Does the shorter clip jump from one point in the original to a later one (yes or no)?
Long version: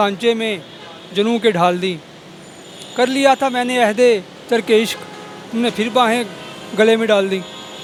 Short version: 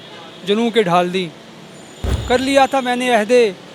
no